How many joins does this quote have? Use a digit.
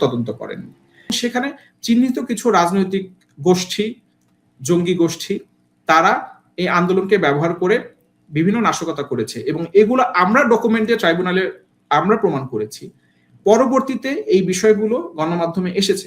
1